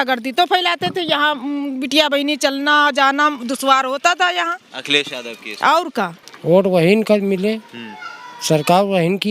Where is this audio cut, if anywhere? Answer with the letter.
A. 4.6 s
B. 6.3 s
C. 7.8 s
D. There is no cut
B